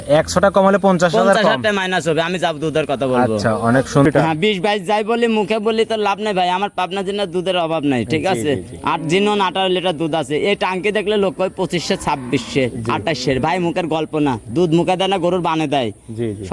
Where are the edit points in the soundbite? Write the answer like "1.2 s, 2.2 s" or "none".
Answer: 4.1 s